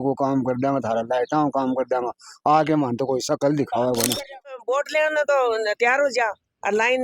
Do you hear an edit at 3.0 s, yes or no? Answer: no